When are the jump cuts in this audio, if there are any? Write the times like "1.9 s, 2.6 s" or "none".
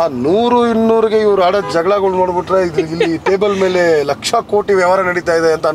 none